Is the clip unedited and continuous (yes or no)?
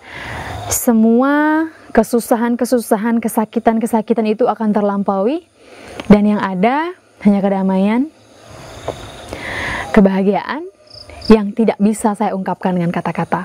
yes